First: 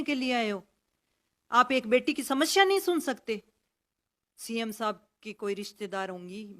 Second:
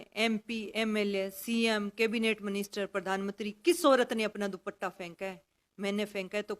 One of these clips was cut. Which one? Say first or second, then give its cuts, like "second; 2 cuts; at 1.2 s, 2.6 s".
first; 1 cut; at 3.8 s